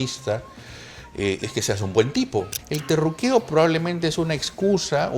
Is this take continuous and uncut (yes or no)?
no